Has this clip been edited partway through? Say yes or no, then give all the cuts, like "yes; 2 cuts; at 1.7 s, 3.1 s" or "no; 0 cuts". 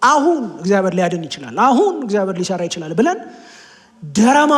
no; 0 cuts